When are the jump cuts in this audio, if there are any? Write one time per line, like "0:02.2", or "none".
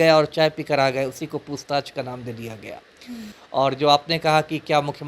0:03.3